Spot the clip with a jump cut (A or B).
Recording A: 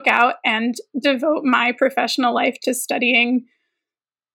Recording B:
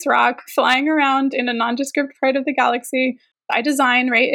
B